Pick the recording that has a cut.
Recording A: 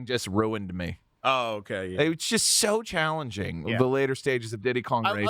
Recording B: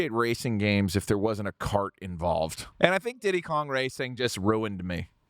B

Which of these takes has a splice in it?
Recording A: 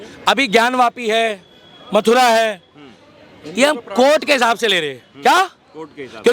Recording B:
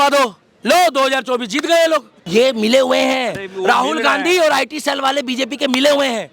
B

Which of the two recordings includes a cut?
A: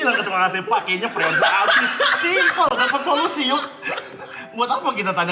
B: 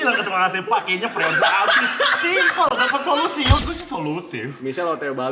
B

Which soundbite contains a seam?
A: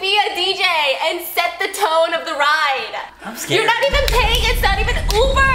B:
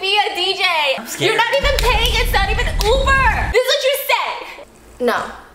B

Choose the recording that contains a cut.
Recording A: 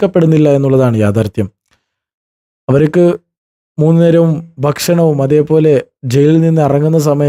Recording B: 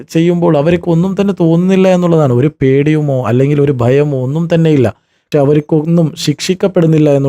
B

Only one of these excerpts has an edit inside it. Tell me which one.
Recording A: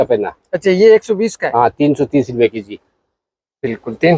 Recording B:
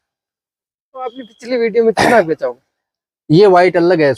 B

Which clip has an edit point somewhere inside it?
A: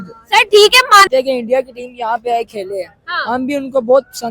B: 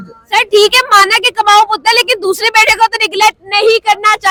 A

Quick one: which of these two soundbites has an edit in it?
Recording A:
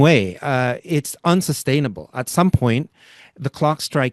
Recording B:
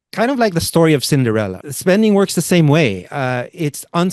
B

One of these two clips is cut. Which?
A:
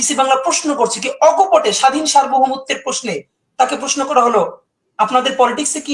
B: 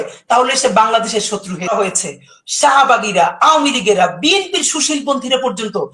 B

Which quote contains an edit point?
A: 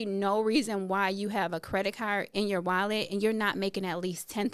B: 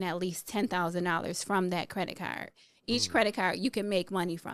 B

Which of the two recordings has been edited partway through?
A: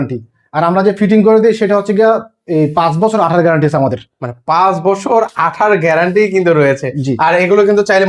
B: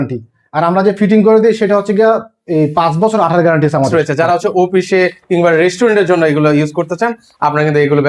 B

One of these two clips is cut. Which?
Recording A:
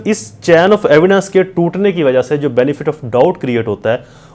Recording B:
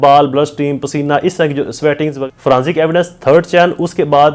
B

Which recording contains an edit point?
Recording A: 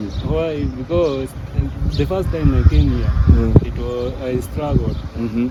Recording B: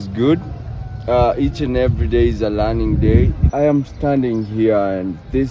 B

